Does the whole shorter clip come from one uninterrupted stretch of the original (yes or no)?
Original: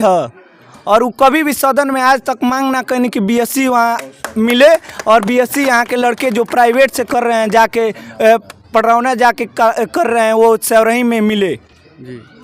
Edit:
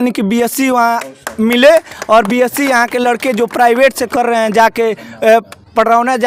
yes